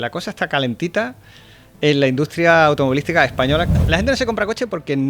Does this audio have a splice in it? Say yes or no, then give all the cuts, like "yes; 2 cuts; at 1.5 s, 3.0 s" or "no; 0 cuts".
yes; 1 cut; at 3.8 s